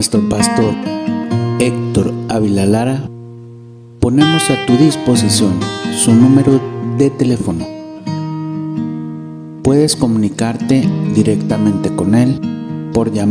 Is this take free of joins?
yes; 0 cuts

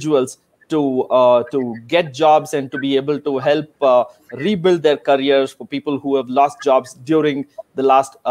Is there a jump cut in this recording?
no; 0 cuts

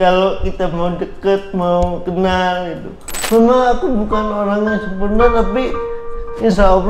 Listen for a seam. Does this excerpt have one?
yes; 1 cut; at 3.2 s

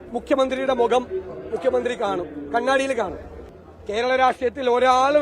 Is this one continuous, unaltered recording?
no; 1 cut; at 3.3 s

